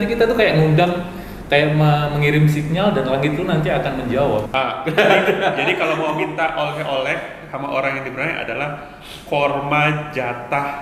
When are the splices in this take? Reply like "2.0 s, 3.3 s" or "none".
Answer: 4.5 s